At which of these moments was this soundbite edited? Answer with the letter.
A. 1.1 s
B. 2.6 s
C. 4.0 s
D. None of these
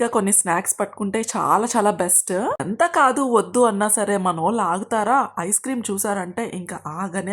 B